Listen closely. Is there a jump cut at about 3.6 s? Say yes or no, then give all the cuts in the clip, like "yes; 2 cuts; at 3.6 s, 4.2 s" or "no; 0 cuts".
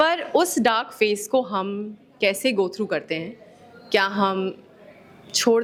no; 0 cuts